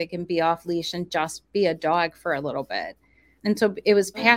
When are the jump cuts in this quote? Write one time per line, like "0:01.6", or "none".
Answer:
0:03.3